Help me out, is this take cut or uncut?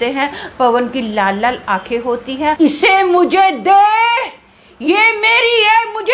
cut